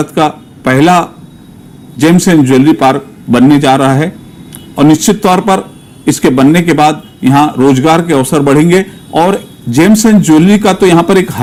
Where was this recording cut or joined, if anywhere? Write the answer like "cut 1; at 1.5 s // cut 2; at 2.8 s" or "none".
none